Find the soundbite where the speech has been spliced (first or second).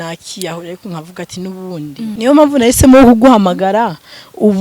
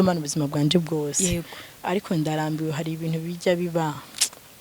first